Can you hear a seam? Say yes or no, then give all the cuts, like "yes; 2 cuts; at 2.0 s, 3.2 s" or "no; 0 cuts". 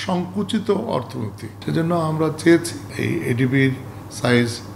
yes; 2 cuts; at 1.6 s, 2.8 s